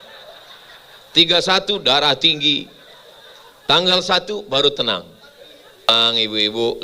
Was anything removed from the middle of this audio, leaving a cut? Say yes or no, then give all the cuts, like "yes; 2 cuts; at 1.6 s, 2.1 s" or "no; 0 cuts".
yes; 1 cut; at 5.9 s